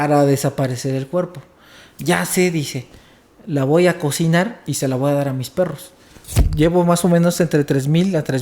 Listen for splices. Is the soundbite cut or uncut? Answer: cut